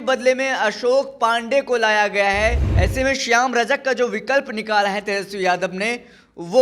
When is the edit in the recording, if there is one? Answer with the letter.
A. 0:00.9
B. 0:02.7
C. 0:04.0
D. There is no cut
B